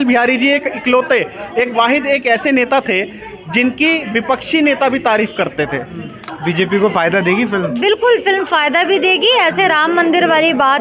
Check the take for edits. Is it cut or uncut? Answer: cut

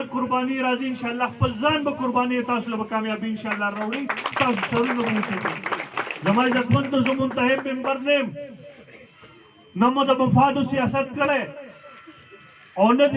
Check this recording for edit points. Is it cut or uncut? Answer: uncut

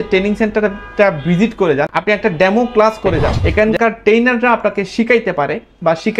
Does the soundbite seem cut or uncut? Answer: cut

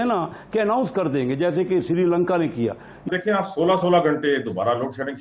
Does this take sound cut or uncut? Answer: cut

